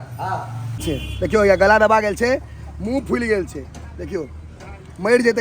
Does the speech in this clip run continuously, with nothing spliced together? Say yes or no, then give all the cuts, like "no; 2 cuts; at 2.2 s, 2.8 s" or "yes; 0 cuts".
no; 1 cut; at 1.0 s